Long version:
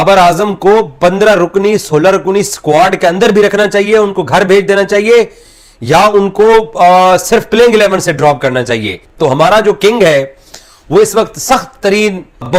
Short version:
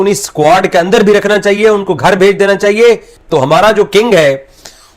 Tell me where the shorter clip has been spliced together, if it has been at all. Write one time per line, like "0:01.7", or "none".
0:03.1